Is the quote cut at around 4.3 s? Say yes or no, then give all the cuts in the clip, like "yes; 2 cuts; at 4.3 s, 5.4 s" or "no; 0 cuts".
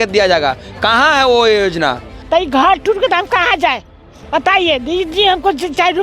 no; 1 cut; at 2.1 s